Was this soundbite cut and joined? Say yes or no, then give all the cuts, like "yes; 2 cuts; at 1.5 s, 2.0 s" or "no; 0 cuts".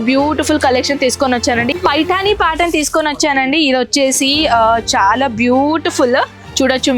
yes; 1 cut; at 1.7 s